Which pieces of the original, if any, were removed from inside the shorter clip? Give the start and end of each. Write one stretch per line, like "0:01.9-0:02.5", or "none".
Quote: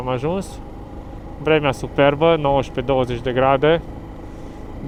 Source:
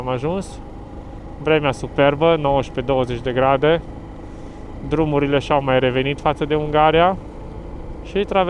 none